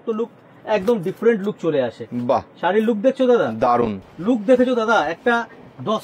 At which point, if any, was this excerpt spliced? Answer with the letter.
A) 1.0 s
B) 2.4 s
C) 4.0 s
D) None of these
C